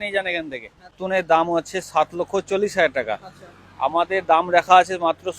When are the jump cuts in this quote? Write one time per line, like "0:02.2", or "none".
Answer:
0:01.0